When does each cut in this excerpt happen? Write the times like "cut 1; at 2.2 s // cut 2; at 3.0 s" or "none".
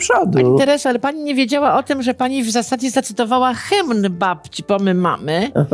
none

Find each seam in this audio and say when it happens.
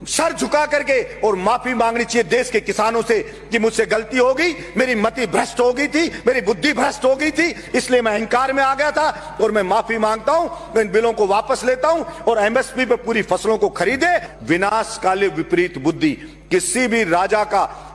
cut 1; at 14.3 s

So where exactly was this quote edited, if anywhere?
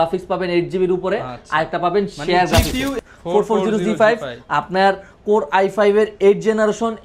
cut 1; at 2.9 s

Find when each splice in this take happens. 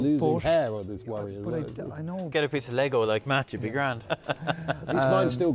cut 1; at 2.3 s // cut 2; at 4.1 s

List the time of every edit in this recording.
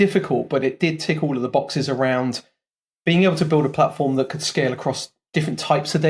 none

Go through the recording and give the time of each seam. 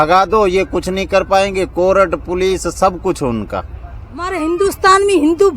cut 1; at 3.6 s

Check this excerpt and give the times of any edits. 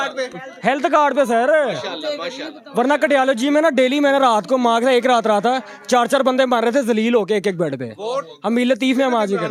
none

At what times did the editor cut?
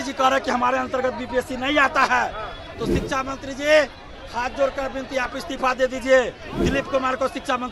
none

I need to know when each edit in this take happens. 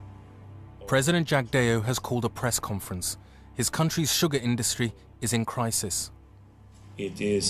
none

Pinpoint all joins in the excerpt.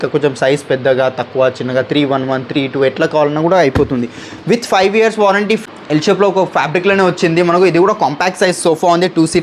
cut 1; at 5.6 s

